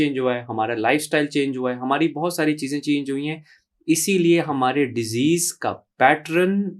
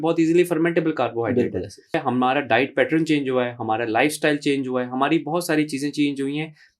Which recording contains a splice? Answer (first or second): second